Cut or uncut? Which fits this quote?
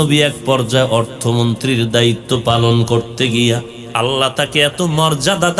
cut